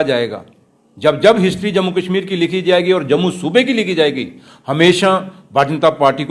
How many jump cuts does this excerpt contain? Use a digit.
0